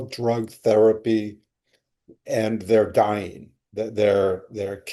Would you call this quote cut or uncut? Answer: uncut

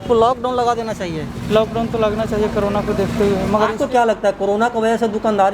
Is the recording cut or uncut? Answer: cut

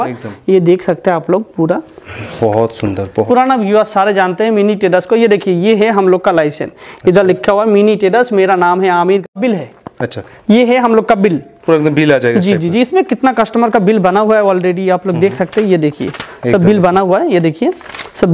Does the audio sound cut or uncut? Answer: cut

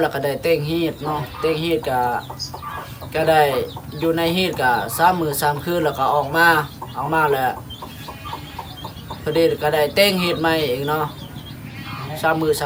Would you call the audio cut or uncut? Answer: uncut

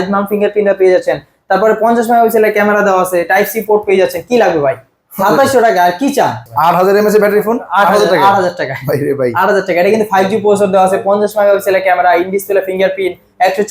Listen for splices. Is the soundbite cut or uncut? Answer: cut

